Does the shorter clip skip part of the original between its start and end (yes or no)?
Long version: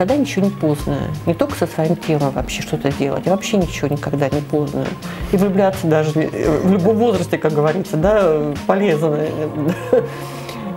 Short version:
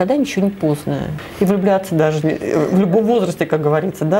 yes